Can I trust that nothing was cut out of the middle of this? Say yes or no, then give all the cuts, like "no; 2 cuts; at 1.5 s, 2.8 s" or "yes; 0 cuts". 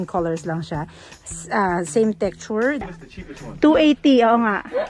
no; 1 cut; at 2.8 s